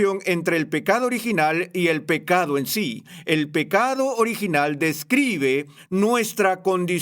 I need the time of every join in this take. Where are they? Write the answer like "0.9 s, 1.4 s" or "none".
5.8 s

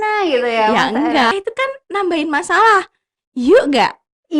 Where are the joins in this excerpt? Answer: 1.3 s

